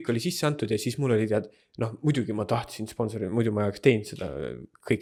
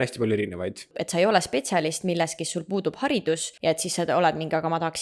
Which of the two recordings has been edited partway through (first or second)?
second